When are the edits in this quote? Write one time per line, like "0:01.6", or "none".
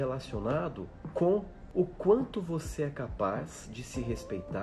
0:00.9
0:01.6